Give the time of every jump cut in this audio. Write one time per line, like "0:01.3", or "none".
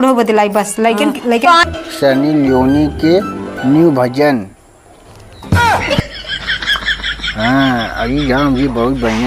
0:01.6